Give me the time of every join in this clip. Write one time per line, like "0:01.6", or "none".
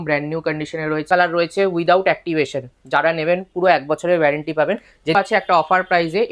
0:01.1
0:05.2